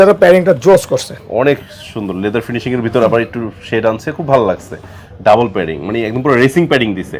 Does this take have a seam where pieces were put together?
no; 0 cuts

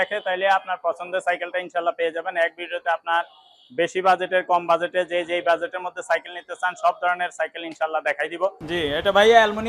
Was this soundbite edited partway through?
yes; 1 cut; at 8.6 s

